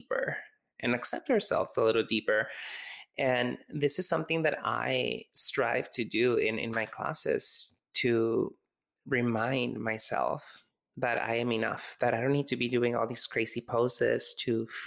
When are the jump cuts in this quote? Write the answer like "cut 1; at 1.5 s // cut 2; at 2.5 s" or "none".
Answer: none